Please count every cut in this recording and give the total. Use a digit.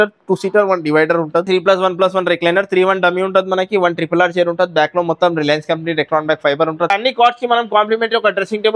2